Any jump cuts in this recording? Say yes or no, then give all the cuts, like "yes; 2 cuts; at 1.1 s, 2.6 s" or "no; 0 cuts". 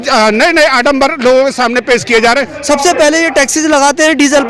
yes; 1 cut; at 2.5 s